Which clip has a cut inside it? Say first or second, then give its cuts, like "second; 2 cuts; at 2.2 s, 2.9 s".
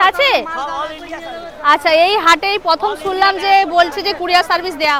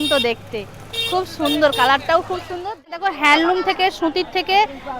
second; 1 cut; at 2.8 s